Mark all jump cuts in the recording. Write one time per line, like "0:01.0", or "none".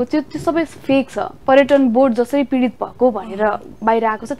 0:01.3